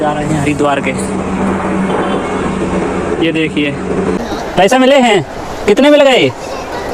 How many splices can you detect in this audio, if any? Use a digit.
1